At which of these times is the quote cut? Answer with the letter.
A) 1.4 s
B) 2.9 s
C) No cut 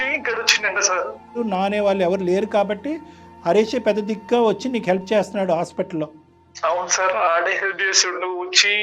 A